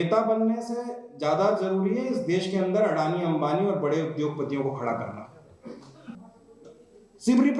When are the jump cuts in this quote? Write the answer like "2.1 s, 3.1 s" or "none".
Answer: 6.2 s